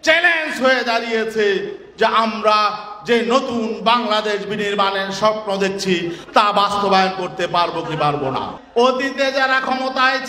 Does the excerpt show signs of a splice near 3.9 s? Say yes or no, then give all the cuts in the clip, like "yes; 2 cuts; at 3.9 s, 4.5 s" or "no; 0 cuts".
no; 1 cut; at 8.6 s